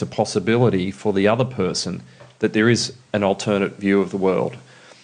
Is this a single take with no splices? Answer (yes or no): yes